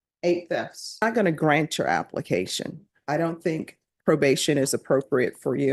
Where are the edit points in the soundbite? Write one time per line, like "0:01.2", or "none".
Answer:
0:01.0